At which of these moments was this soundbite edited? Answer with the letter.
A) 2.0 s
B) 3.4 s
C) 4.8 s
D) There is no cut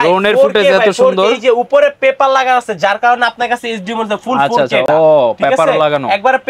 D